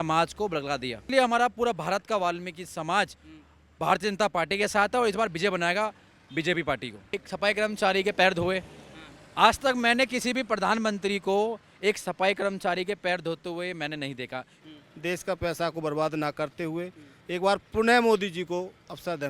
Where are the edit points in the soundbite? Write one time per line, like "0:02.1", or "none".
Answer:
0:01.0
0:07.1
0:14.6